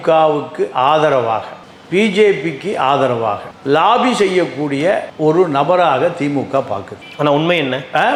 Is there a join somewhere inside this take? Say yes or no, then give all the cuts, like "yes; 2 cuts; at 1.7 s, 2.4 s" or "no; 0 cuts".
no; 0 cuts